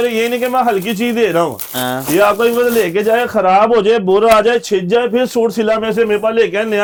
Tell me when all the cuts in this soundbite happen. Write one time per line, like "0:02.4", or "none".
none